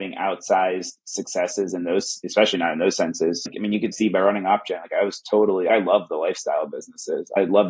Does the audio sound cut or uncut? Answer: cut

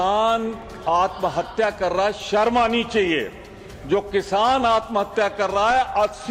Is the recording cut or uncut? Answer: uncut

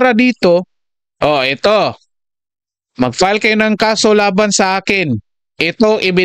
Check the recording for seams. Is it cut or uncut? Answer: uncut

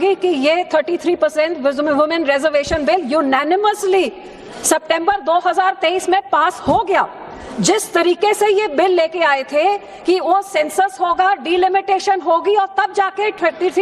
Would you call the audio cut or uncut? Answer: cut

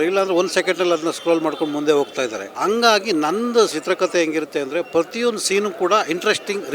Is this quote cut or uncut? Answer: cut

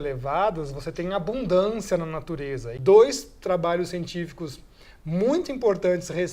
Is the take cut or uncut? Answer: cut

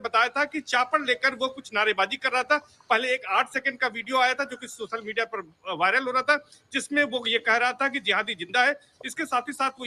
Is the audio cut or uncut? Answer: cut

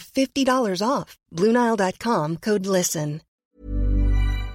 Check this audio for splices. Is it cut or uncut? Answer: cut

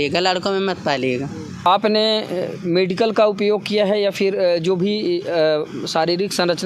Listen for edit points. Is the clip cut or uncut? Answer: cut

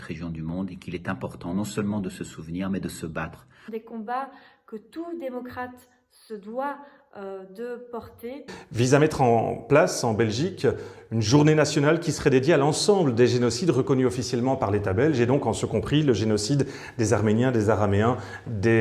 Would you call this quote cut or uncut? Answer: cut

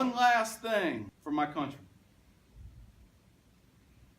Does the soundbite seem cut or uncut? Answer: cut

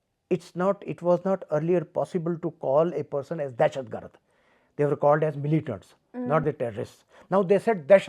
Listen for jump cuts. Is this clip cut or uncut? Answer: uncut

